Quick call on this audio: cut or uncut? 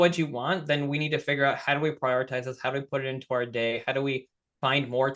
uncut